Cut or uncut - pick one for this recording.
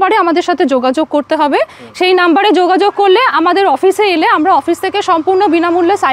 uncut